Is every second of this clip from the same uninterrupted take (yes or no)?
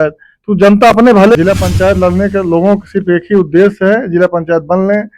no